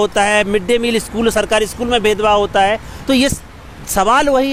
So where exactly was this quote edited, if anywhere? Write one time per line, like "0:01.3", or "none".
none